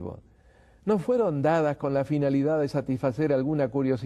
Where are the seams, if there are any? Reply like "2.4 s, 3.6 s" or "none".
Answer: 3.0 s